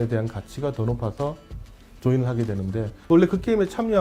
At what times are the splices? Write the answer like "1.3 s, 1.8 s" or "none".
3.0 s